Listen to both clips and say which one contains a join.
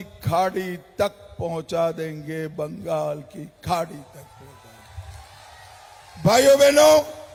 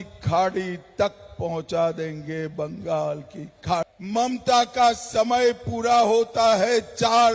second; 1 cut; at 4.0 s

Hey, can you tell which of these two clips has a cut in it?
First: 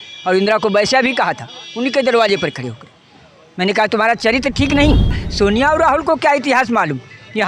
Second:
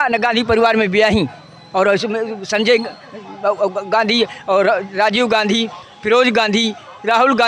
first; 1 cut; at 5.2 s

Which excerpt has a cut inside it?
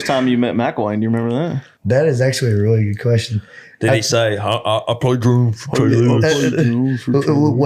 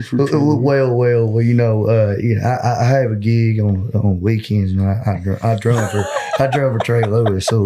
first; 1 cut; at 1.7 s

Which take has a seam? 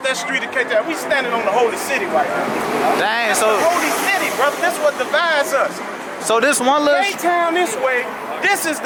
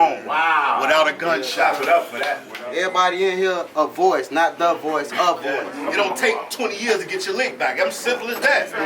second; 2 cuts; at 2.5 s, 5.8 s

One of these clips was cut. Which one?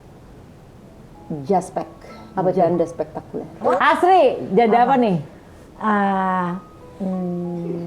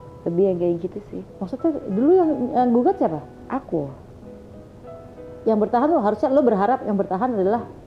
first; 1 cut; at 3.8 s

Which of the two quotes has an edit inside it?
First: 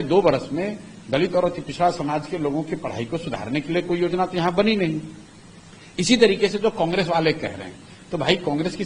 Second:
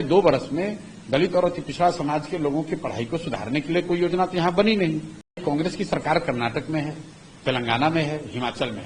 second; 1 cut; at 5.4 s

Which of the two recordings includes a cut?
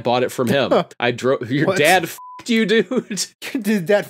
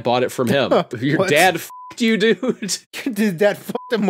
second; 1 cut; at 0.9 s

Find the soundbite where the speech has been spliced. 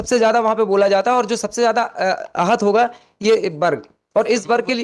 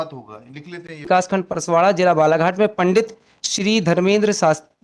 second; 1 cut; at 1.1 s

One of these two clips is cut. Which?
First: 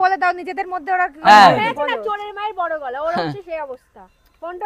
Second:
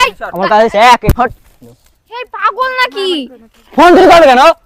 second; 1 cut; at 1.1 s

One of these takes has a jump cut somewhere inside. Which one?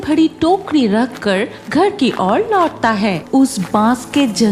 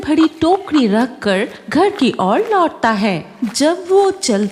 first; 1 cut; at 3.2 s

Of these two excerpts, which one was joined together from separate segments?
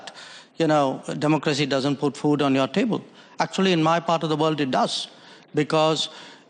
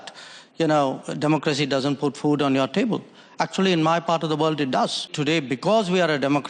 second; 1 cut; at 5.1 s

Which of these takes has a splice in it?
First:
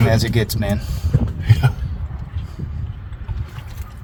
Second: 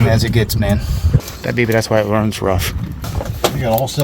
second; 2 cuts; at 1.3 s, 3.0 s

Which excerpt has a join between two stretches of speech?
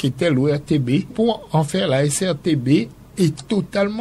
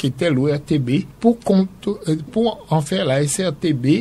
first; 2 cuts; at 1.1 s, 3.0 s

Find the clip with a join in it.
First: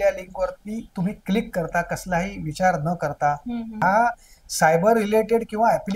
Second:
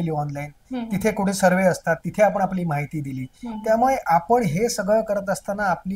first; 1 cut; at 3.8 s

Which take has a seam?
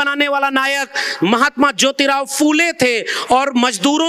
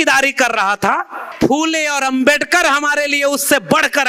second; 1 cut; at 1.2 s

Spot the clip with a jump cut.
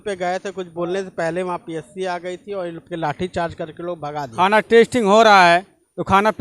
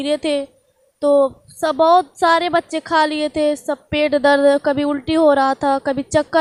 first; 1 cut; at 4.3 s

